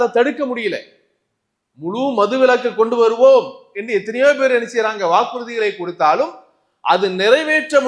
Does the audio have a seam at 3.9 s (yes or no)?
no